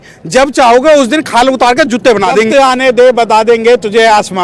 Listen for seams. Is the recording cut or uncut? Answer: cut